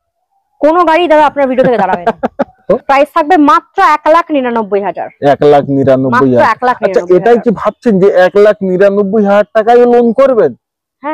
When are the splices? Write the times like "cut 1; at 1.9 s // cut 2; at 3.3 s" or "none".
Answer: cut 1; at 2.6 s